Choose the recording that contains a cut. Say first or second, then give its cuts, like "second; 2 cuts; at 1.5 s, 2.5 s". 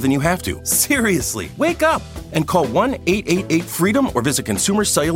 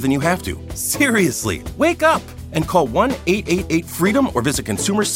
first; 1 cut; at 1.0 s